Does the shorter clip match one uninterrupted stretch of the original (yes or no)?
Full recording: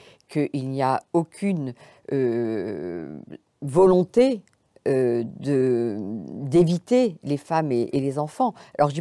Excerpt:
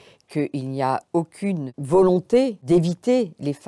no